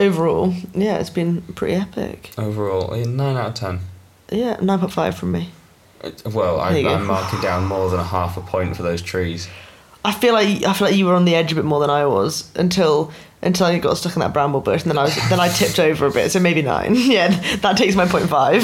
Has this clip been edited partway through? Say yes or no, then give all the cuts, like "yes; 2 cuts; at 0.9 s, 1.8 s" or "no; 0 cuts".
no; 0 cuts